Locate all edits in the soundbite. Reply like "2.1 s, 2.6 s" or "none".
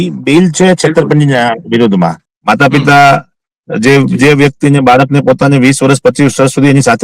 2.3 s

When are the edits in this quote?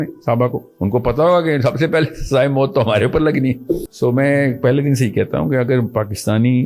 3.9 s

